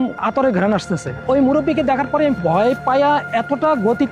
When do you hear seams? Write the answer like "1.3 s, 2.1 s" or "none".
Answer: 1.1 s

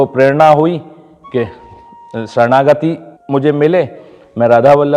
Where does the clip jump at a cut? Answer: 3.1 s

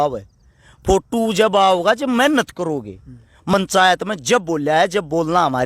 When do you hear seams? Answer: 3.5 s

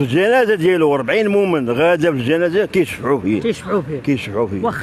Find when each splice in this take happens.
none

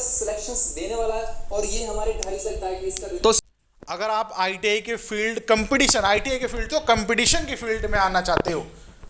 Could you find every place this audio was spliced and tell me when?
3.4 s

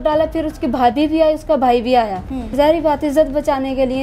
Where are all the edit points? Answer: 2.5 s

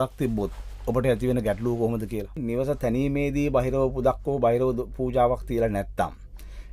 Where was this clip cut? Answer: 2.4 s

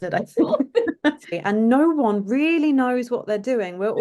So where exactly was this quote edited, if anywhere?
1.4 s

